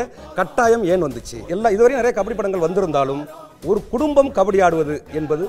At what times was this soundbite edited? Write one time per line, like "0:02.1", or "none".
0:01.5